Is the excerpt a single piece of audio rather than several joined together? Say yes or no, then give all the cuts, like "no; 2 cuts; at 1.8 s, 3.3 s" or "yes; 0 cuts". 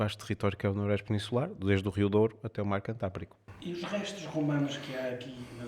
yes; 0 cuts